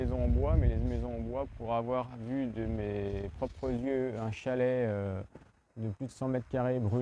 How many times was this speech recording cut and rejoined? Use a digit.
0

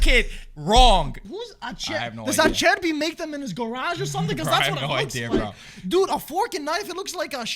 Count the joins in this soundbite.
1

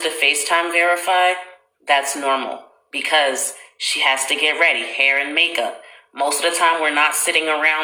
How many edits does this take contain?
0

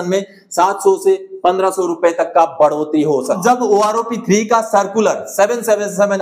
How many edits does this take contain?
1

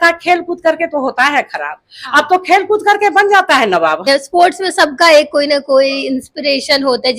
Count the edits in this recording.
1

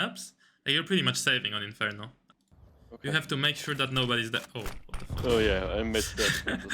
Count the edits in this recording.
1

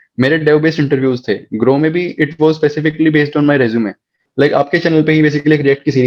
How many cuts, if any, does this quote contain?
1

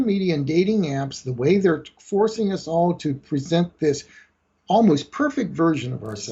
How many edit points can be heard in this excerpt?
0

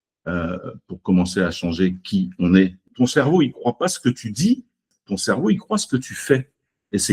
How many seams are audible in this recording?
2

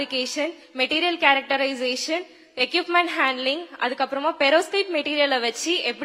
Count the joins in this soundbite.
0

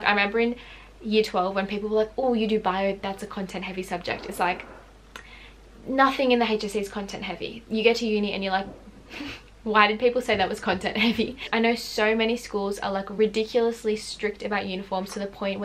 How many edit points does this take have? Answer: 2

